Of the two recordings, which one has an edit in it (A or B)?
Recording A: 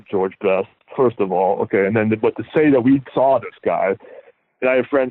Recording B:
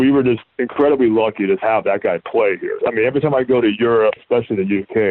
B